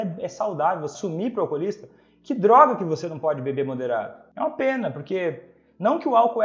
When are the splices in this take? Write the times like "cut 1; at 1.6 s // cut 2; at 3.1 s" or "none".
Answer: cut 1; at 0.9 s // cut 2; at 4.2 s